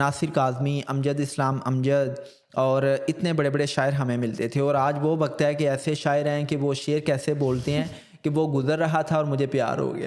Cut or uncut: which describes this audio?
uncut